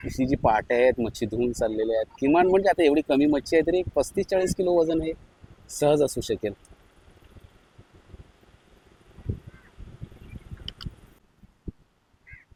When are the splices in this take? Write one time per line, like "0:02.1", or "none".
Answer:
none